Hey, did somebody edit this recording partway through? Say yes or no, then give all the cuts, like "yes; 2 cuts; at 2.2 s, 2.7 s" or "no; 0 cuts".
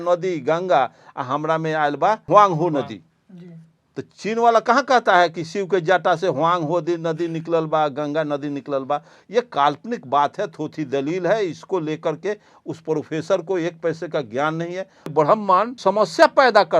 yes; 3 cuts; at 2.2 s, 15.1 s, 15.7 s